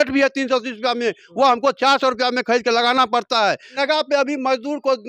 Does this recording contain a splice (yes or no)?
yes